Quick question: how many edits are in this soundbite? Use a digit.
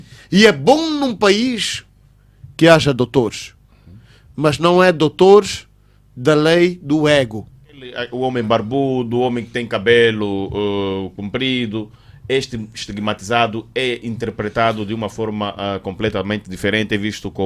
1